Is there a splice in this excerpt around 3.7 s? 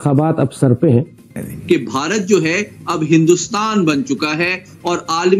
no; 1 cut; at 1.5 s

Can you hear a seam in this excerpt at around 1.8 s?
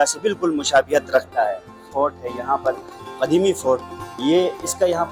yes; 1 cut; at 1.8 s

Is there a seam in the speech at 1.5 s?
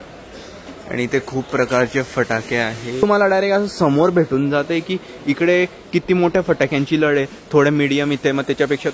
no; 1 cut; at 3.0 s

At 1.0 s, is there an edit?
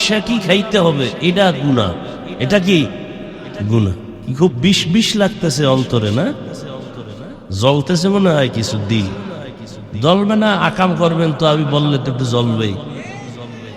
no; 2 cuts; at 2.3 s, 4.1 s

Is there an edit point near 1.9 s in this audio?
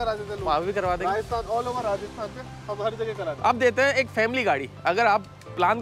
no; 1 cut; at 3.4 s

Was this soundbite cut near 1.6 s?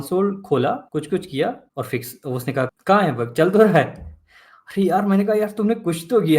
yes; 3 cuts; at 0.8 s, 1.6 s, 2.7 s

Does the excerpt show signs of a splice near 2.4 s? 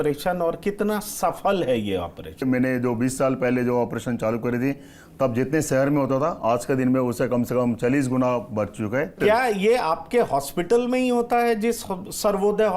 yes; 2 cuts; at 2.4 s, 9.2 s

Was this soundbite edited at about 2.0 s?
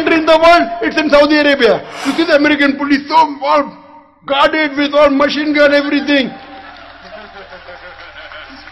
yes; 1 cut; at 2.0 s

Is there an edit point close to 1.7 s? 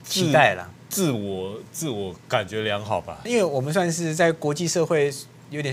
no; 1 cut; at 3.2 s

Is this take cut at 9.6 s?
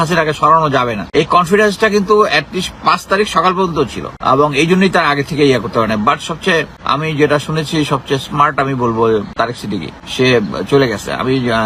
yes; 4 cuts; at 1.0 s, 4.1 s, 6.8 s, 9.6 s

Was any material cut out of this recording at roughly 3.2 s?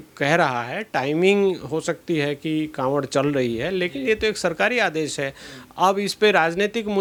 no; 0 cuts

